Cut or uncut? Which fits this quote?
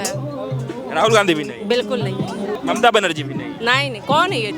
cut